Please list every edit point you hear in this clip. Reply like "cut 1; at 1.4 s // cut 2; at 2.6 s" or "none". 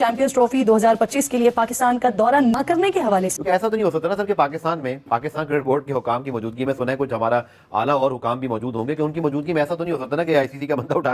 cut 1; at 3.4 s